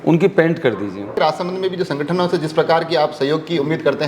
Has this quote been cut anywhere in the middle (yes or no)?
yes